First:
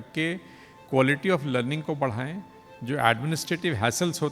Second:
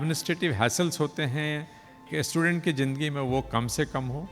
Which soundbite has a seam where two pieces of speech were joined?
second; 1 cut; at 2.1 s

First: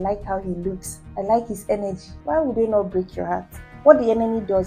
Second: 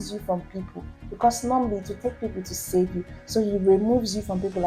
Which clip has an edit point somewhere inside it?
first; 3 cuts; at 0.9 s, 2.1 s, 3.7 s

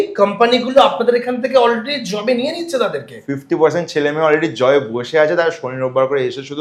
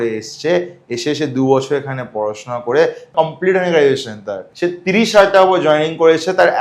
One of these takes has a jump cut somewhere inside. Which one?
second; 2 cuts; at 3.1 s, 4.4 s

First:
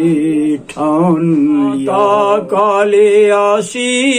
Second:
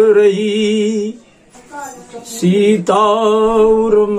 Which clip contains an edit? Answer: first; 1 cut; at 1.9 s

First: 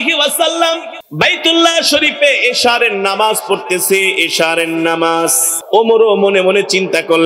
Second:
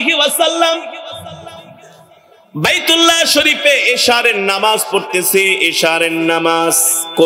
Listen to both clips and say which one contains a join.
first; 2 cuts; at 1.0 s, 5.6 s

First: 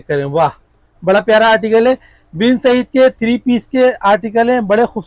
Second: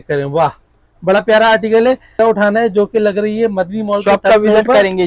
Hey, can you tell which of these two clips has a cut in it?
second; 1 cut; at 2.2 s

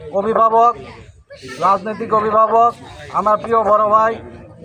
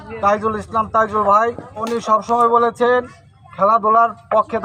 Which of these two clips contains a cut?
second; 1 cut; at 1.8 s

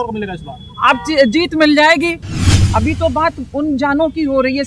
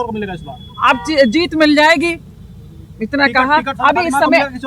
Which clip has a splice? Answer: first; 1 cut; at 2.6 s

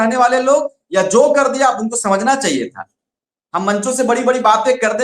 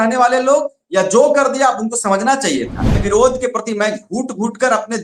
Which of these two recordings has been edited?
second; 1 cut; at 3.0 s

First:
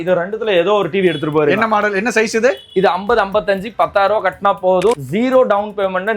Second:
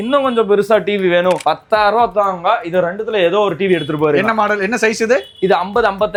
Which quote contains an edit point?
first; 1 cut; at 5.0 s

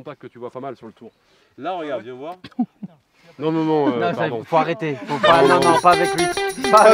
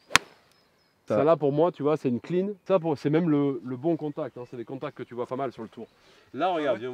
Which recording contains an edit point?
second; 2 cuts; at 1.0 s, 2.6 s

